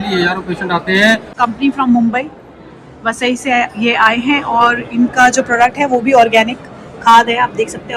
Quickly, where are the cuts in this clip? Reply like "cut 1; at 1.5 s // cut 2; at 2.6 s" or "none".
cut 1; at 1.3 s